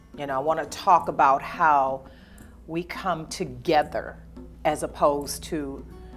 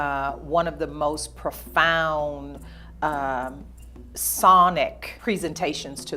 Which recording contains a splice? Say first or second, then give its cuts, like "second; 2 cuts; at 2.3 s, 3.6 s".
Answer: second; 1 cut; at 5.1 s